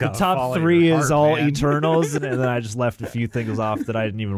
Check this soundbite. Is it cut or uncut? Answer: cut